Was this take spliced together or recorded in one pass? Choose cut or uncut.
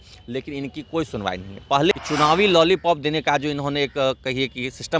cut